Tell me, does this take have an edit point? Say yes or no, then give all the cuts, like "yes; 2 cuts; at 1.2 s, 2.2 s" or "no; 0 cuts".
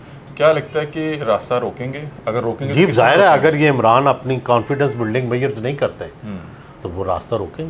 no; 0 cuts